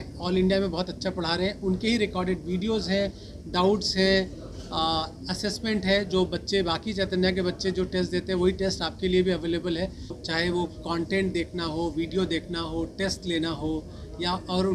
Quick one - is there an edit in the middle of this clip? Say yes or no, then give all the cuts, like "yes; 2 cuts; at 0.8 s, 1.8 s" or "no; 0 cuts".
yes; 1 cut; at 10.2 s